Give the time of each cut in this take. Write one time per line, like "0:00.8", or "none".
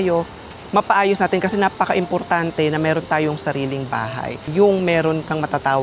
0:04.4